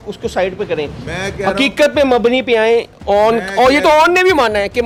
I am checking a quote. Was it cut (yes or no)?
no